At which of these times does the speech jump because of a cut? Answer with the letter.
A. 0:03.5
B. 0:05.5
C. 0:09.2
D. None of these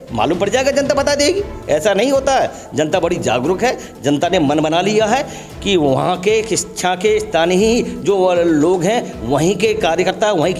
D